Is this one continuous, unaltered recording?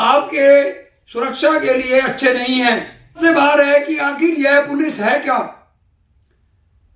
no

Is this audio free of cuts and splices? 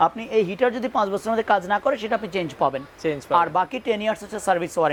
yes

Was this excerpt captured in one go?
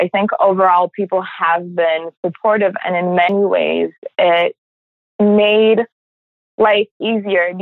yes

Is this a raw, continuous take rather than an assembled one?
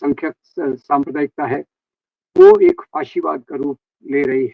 yes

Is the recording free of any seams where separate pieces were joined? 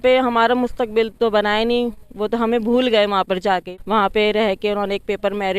no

